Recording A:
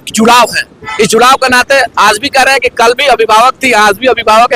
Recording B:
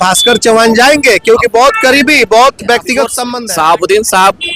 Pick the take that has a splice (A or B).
B